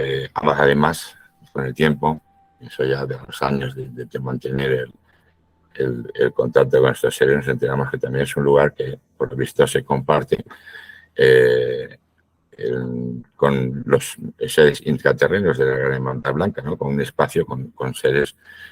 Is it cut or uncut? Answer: uncut